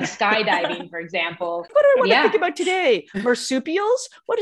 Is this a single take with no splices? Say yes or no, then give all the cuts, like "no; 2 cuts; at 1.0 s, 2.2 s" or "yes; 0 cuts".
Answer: no; 1 cut; at 1.7 s